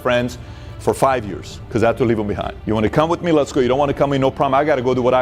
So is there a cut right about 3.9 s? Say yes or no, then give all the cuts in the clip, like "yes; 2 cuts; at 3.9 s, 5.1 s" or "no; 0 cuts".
no; 0 cuts